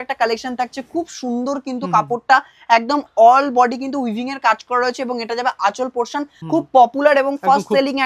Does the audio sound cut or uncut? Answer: cut